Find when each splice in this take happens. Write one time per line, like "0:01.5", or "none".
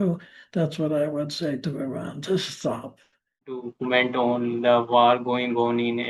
0:03.6